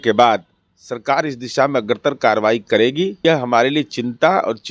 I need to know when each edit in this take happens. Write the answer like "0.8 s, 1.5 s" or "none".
3.2 s